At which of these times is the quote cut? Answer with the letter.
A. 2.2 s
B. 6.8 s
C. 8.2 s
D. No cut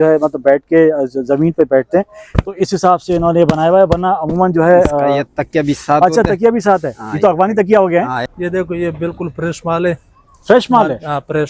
C